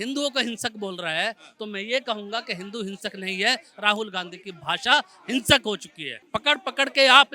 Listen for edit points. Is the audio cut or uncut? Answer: cut